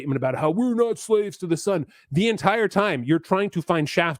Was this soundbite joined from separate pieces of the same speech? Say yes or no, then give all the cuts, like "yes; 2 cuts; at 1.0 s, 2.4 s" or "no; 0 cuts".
no; 0 cuts